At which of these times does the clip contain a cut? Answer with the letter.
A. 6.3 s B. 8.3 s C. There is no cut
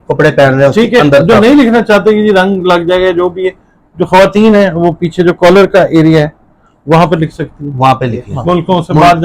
B